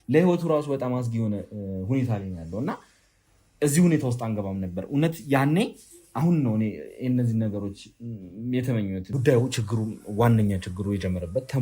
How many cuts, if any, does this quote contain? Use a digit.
1